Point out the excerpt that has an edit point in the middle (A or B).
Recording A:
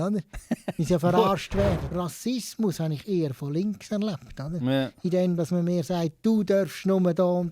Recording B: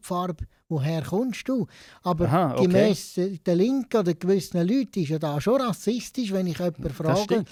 A